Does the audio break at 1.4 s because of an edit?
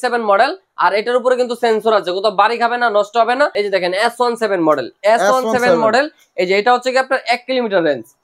no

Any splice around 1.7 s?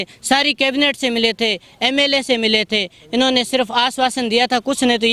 no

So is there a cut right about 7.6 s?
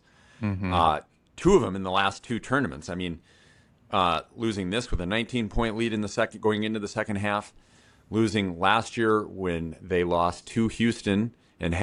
no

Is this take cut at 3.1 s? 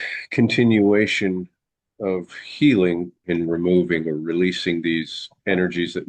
yes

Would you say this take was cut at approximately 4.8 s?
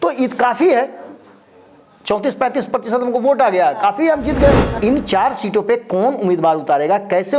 yes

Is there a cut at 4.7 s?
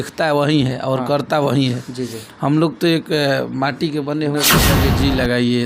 yes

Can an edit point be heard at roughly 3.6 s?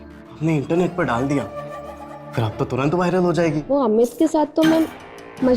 yes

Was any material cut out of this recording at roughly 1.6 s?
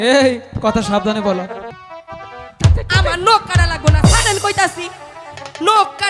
yes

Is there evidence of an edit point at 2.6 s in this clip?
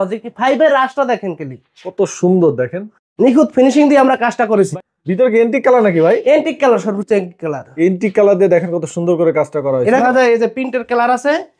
no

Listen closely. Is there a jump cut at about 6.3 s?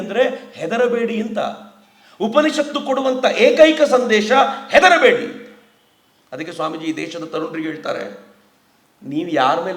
no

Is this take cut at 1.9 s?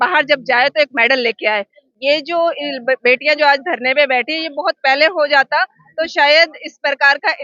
yes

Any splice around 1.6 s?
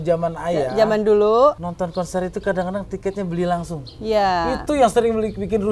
yes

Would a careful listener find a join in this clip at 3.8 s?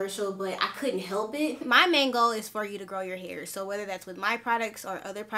no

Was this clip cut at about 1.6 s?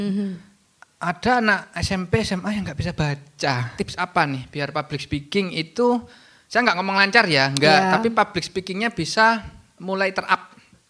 no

